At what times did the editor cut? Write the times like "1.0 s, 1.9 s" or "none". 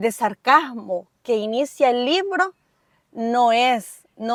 none